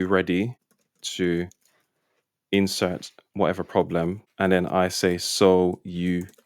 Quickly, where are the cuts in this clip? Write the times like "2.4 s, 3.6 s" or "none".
4.2 s